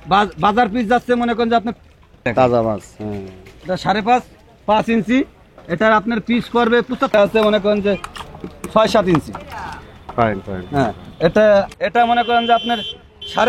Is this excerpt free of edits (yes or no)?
no